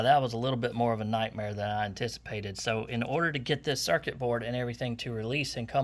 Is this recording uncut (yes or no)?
yes